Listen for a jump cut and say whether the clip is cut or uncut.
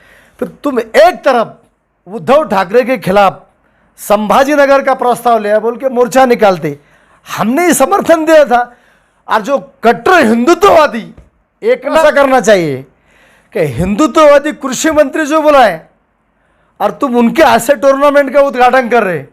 cut